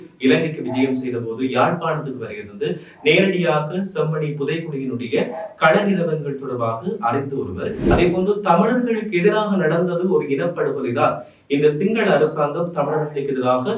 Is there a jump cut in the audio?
yes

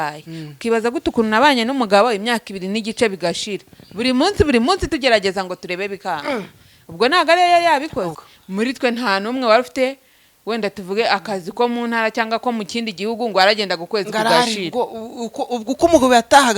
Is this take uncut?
no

